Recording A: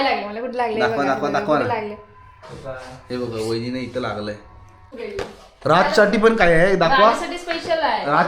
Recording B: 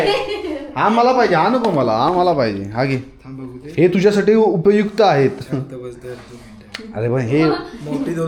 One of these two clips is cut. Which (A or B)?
A